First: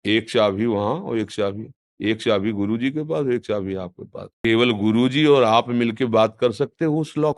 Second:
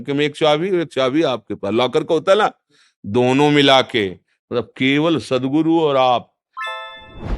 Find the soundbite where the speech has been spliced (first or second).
second